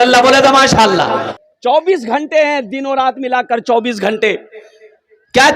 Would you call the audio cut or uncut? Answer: cut